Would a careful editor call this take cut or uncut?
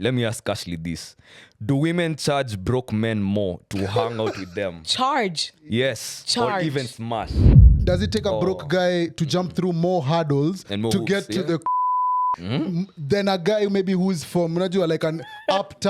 cut